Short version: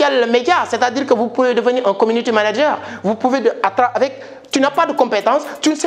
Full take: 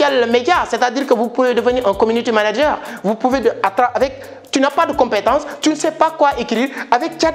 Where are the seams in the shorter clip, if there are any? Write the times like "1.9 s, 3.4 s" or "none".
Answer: none